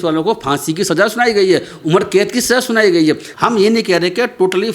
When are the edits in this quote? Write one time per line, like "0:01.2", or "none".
0:03.3